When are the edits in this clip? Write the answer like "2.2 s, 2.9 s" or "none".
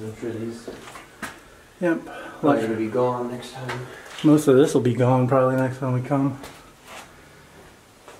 none

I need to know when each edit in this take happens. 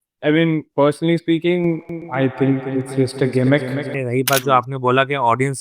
3.9 s

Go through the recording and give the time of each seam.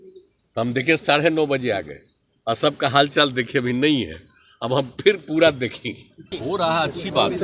6.3 s

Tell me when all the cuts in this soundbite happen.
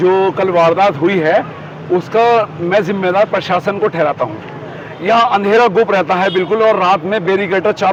none

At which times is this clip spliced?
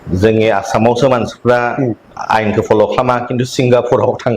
0.9 s

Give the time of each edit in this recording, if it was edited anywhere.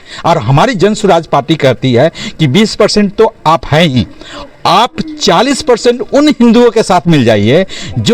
none

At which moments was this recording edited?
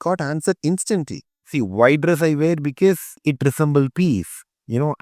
1.5 s, 3.2 s

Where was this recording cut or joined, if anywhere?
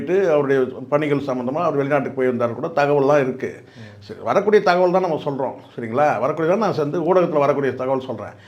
none

